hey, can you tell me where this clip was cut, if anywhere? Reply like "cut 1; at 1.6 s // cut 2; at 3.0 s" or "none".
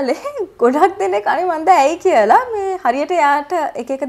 none